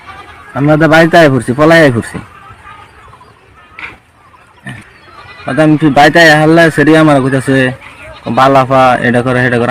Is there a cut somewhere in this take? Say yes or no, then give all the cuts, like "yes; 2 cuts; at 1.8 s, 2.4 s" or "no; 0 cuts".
yes; 1 cut; at 4.7 s